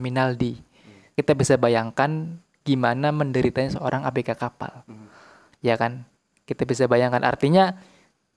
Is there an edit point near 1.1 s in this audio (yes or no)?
yes